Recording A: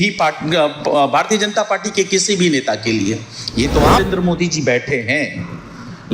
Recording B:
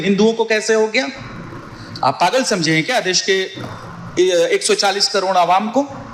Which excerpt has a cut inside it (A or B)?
A